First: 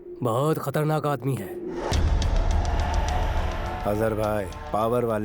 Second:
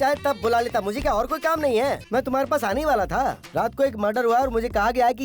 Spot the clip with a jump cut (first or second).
second